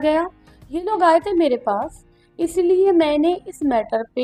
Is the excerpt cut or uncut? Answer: uncut